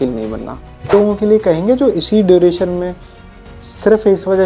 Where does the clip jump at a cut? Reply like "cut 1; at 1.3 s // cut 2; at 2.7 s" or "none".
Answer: cut 1; at 0.9 s